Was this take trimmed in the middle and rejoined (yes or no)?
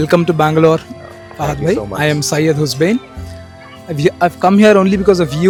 no